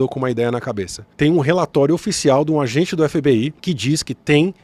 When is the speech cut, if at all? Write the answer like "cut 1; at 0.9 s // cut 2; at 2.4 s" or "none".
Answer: none